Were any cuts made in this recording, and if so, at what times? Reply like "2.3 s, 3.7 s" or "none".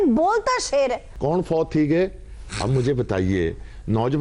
1.1 s